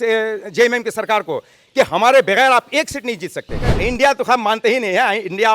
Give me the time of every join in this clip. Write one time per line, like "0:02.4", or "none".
0:03.8

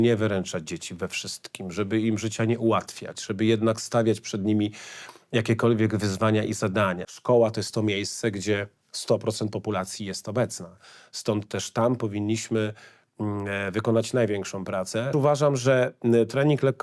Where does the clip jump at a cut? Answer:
0:07.1
0:15.1

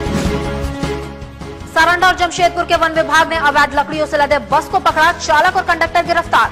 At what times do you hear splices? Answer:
none

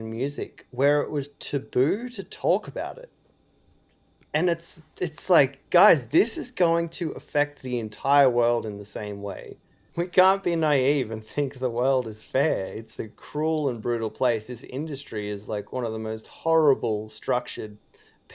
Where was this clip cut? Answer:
0:09.8

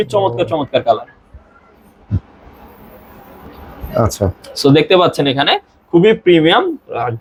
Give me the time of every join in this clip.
none

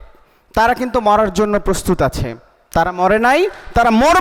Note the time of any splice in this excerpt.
none

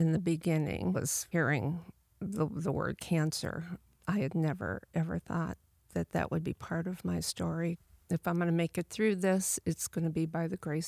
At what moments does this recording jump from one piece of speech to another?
0:01.3
0:07.9

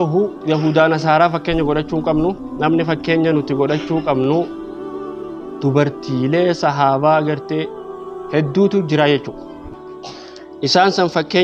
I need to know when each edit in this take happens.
none

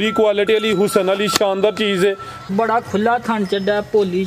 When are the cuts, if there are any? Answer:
0:02.4

